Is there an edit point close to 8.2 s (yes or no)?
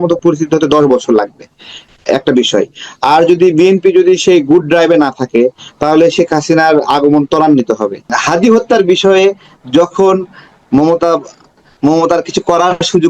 yes